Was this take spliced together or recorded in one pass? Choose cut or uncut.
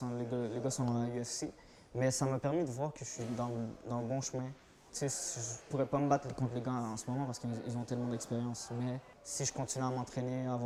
uncut